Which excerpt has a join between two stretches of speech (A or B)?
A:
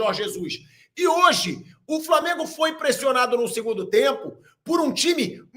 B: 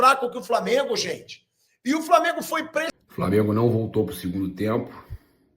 B